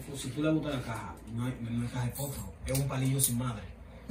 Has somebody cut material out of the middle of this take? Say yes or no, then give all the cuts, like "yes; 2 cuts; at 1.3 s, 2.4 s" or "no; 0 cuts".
no; 0 cuts